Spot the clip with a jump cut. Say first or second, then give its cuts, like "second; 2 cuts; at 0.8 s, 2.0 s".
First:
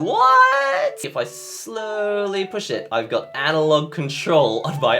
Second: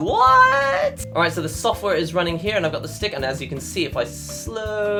first; 1 cut; at 1.1 s